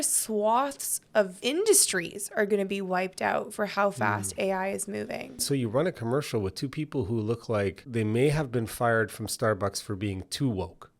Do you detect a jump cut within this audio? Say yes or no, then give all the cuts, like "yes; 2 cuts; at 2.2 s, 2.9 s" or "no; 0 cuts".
yes; 2 cuts; at 1.4 s, 5.4 s